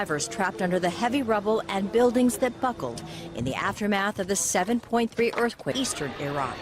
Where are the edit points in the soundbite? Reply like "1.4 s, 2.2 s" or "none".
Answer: 5.7 s